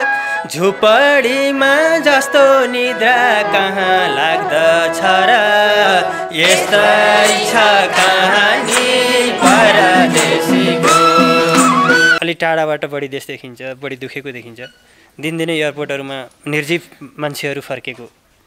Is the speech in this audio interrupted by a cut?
yes; 2 cuts; at 12.1 s, 16.3 s

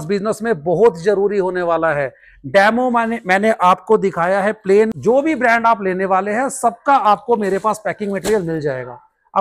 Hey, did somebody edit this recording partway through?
no; 0 cuts

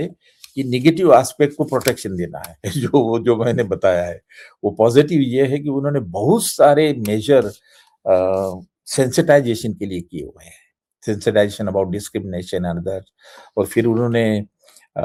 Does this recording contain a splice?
no; 0 cuts

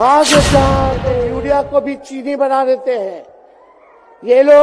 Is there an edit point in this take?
yes; 1 cut; at 1.1 s

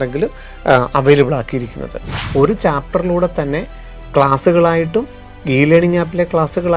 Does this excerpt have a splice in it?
yes; 1 cut; at 2.1 s

